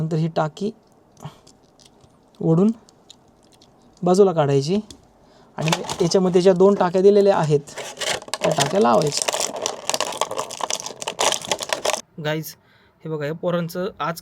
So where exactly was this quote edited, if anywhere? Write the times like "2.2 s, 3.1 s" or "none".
12.0 s